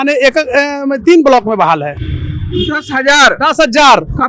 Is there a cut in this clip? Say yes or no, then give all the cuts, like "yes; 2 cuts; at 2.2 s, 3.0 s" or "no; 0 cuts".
no; 0 cuts